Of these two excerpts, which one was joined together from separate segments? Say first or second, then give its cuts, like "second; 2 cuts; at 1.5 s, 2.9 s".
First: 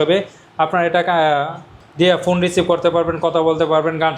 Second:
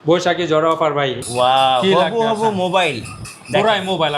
second; 1 cut; at 1.2 s